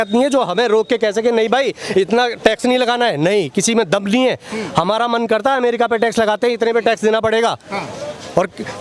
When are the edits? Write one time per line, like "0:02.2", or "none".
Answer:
none